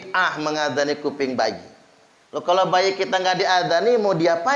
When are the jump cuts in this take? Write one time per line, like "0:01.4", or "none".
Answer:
none

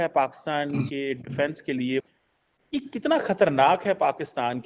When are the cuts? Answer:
0:02.0

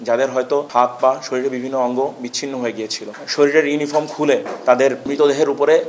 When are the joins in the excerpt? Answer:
0:03.1

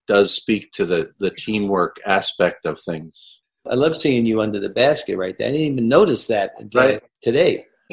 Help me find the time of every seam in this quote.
0:03.3
0:07.1

